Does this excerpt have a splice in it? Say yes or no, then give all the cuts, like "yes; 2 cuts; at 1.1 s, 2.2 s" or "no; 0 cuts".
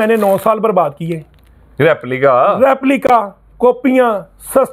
no; 0 cuts